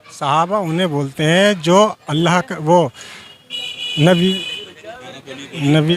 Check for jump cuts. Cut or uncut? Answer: uncut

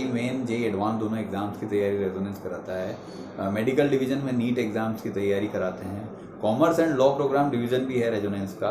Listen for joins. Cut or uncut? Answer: uncut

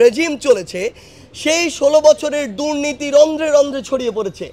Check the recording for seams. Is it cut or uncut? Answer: uncut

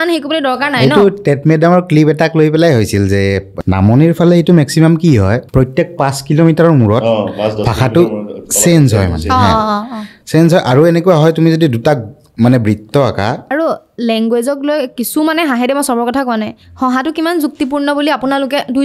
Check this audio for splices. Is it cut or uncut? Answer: cut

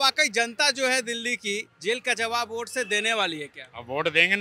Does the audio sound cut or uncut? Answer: uncut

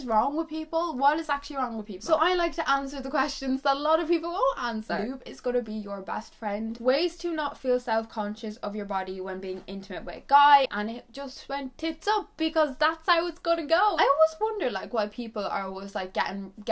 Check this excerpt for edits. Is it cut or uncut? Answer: cut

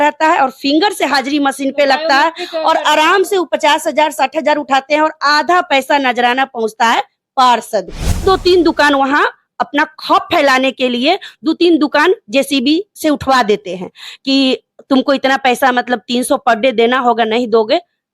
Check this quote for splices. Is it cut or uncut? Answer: cut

